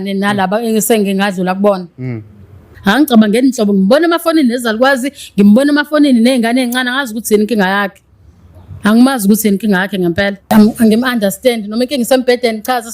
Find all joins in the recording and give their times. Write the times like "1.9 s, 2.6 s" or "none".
2.7 s, 10.5 s